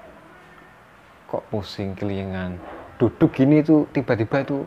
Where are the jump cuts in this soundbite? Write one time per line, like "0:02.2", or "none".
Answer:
none